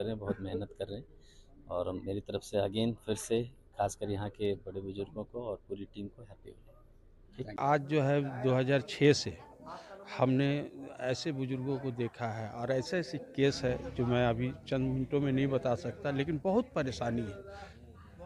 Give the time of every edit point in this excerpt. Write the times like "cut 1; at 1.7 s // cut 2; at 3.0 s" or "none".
cut 1; at 7.6 s